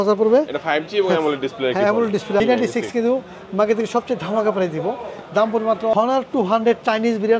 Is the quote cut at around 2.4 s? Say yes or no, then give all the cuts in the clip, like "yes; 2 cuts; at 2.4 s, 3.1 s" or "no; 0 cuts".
yes; 2 cuts; at 2.4 s, 5.9 s